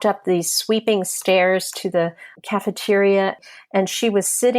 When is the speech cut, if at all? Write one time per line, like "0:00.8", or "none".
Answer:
0:02.3
0:03.5